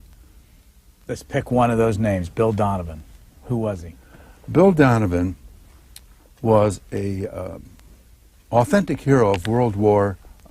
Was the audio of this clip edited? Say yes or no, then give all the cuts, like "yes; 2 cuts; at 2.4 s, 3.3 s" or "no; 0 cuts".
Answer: yes; 1 cut; at 1.1 s